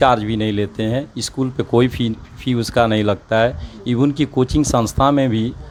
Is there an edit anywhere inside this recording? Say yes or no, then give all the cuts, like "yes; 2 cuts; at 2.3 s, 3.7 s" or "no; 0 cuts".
no; 0 cuts